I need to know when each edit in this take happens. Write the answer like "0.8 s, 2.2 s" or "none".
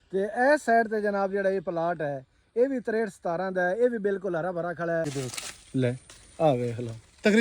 5.1 s